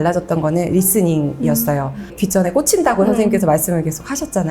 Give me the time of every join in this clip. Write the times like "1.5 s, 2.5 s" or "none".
2.1 s